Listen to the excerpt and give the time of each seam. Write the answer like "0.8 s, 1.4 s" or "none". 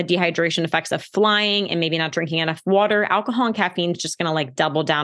none